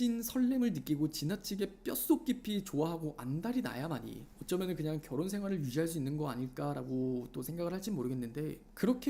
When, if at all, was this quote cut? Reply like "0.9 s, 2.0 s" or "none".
none